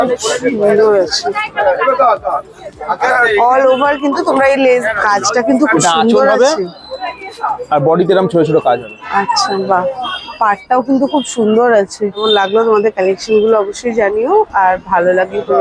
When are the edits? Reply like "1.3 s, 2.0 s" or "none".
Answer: 4.8 s, 12.2 s

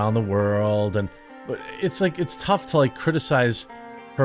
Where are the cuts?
1.4 s

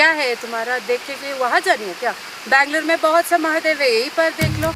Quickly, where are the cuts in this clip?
none

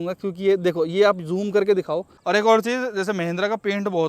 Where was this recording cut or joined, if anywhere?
2.1 s

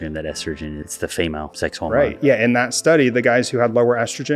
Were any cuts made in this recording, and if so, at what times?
0.9 s, 1.8 s

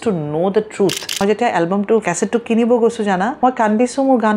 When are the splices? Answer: 1.2 s, 2.1 s, 3.3 s

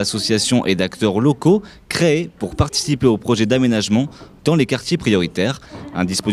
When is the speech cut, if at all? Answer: 4.8 s

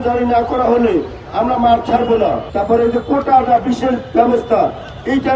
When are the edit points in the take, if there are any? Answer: 2.5 s

